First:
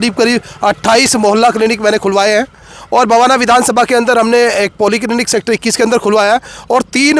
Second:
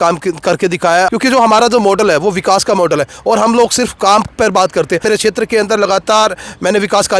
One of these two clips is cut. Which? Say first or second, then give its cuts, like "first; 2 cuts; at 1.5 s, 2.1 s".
second; 2 cuts; at 1.1 s, 5.0 s